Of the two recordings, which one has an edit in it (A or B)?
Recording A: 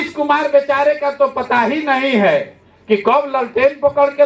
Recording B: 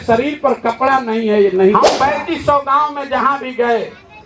B